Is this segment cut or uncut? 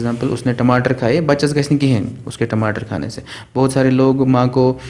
uncut